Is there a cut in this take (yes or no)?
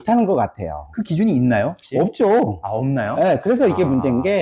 no